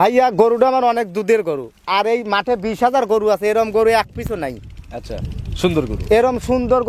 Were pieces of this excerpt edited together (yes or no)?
no